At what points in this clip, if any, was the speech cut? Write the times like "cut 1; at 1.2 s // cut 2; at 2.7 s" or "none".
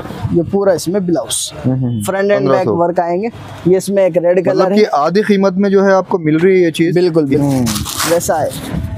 cut 1; at 7.4 s